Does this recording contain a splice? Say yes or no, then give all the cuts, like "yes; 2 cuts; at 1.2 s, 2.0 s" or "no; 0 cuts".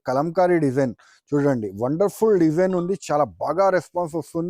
no; 0 cuts